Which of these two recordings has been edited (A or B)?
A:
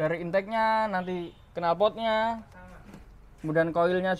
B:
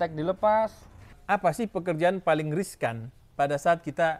B